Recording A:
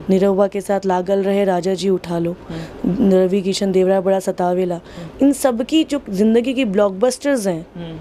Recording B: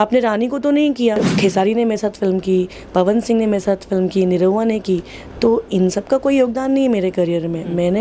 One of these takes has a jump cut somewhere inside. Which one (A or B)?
B